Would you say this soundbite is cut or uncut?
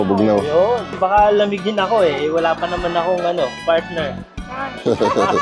cut